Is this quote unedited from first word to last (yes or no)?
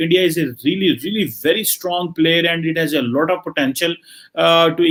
yes